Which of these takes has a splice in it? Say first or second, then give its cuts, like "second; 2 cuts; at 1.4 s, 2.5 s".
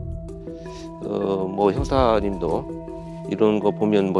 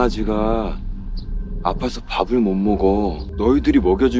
second; 1 cut; at 3.3 s